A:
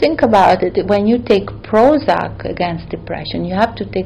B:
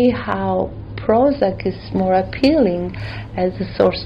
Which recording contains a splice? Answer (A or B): B